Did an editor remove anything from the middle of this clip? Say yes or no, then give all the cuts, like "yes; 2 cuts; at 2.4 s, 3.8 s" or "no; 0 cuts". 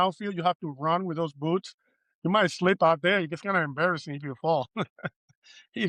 no; 0 cuts